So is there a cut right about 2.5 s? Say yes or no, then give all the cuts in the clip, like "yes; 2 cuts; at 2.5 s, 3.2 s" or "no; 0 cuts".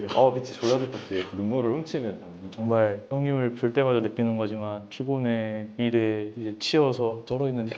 yes; 1 cut; at 2.5 s